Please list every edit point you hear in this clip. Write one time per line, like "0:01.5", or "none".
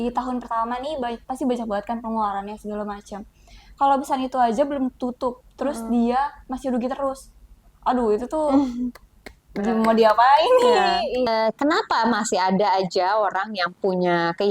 0:11.3